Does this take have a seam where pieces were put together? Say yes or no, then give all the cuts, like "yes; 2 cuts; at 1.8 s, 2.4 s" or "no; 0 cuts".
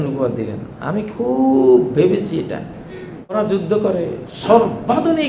yes; 1 cut; at 3.3 s